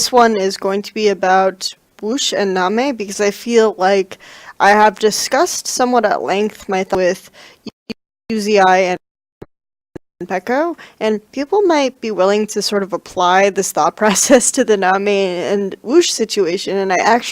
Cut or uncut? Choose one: uncut